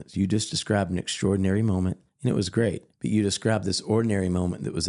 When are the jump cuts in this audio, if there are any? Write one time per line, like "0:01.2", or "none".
0:02.1
0:02.9